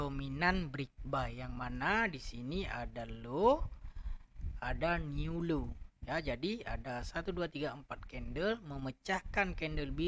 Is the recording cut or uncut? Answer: uncut